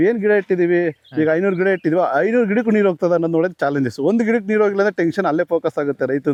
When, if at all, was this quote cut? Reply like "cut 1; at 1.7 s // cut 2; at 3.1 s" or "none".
none